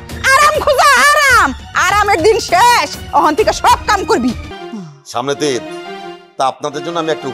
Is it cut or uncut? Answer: cut